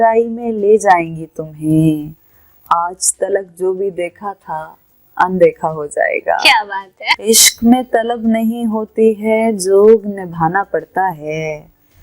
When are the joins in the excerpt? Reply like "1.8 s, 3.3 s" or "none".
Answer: 7.3 s

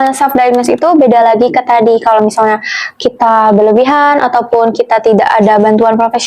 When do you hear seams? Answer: none

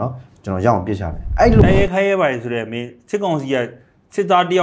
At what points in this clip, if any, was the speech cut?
1.6 s

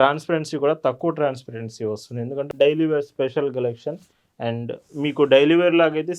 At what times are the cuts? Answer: 2.5 s

